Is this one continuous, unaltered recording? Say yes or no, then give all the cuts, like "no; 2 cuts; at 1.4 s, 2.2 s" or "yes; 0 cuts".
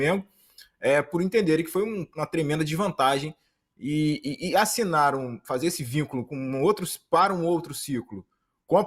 yes; 0 cuts